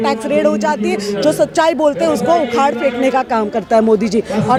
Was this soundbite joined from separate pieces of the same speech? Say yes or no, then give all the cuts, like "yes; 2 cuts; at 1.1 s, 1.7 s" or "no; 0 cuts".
no; 0 cuts